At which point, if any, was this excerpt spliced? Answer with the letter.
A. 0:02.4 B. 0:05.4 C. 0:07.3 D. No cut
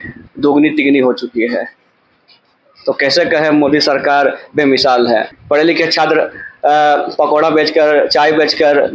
B